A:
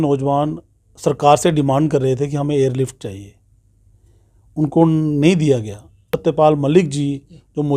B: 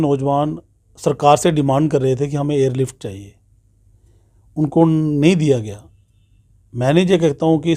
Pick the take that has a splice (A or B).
A